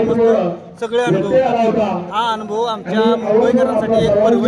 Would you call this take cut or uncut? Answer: uncut